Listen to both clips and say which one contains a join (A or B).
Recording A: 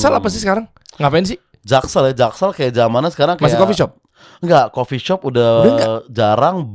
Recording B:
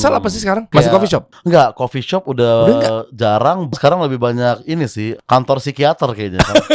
B